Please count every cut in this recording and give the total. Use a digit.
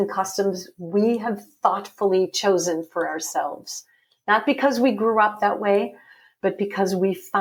0